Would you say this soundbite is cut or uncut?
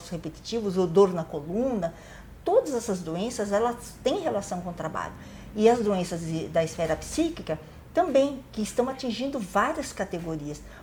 uncut